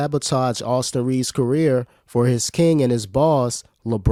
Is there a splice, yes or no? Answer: no